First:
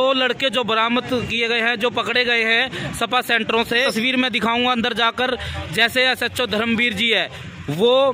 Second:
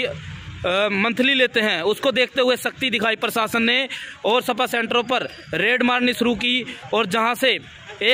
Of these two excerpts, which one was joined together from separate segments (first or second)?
first